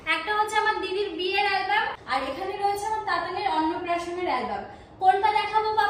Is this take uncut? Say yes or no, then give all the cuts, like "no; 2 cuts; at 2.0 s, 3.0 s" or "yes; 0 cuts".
no; 1 cut; at 2.0 s